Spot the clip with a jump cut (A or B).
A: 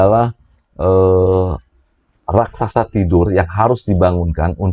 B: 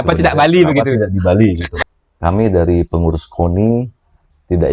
B